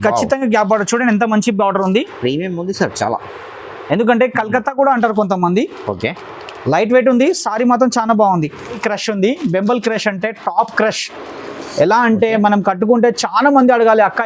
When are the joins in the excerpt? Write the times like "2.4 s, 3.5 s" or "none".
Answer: 8.8 s